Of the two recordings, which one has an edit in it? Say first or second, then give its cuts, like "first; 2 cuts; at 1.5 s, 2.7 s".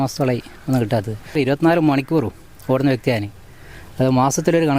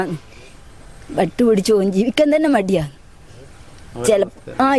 first; 1 cut; at 1.4 s